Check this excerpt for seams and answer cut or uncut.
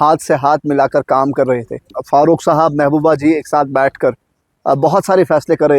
cut